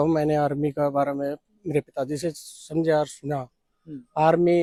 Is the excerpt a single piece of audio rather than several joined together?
yes; 0 cuts

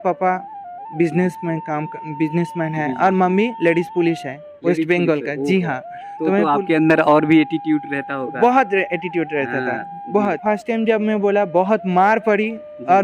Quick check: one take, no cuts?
no; 1 cut; at 10.4 s

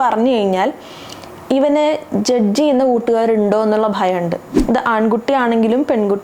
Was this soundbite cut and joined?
yes; 1 cut; at 4.5 s

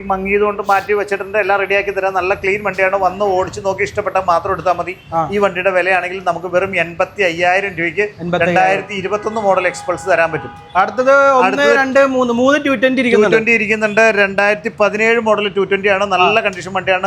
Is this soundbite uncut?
yes; 0 cuts

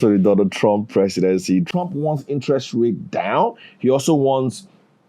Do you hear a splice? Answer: yes; 1 cut; at 1.7 s

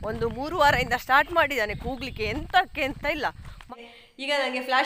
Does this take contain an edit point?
yes; 1 cut; at 3.7 s

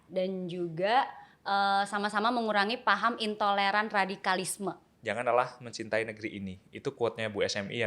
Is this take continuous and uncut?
no; 1 cut; at 4.9 s

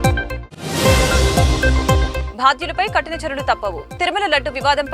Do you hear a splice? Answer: no; 0 cuts

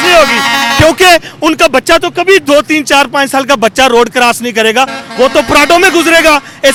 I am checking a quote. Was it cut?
no; 0 cuts

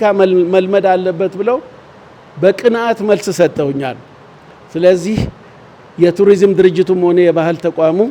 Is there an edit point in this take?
no; 0 cuts

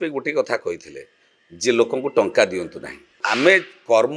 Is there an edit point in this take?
yes; 1 cut; at 3.2 s

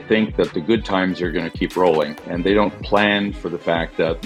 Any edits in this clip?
no; 0 cuts

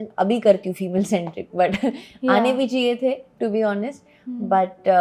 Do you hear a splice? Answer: no; 0 cuts

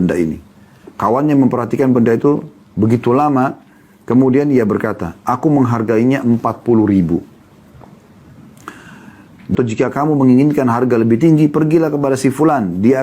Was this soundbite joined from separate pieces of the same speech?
yes; 1 cut; at 9.5 s

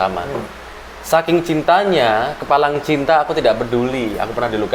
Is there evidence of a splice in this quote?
no; 0 cuts

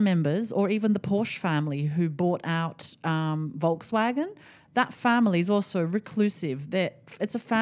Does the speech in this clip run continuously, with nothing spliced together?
yes; 0 cuts

